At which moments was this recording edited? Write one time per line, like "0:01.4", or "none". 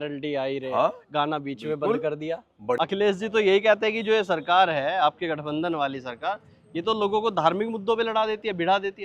0:02.8